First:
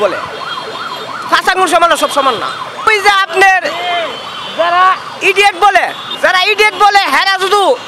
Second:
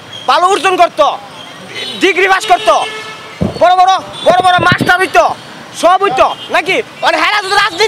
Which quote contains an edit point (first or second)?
first